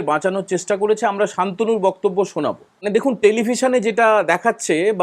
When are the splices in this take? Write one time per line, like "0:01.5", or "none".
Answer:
0:02.8